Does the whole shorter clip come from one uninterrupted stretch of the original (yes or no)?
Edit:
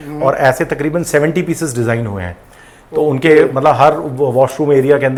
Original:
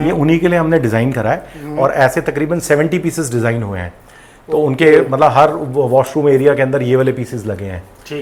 yes